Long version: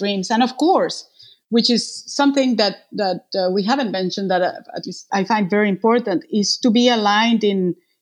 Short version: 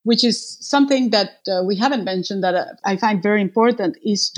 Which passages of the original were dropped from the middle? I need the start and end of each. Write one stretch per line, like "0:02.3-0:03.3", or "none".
0:02.8-0:03.2
0:04.6-0:05.0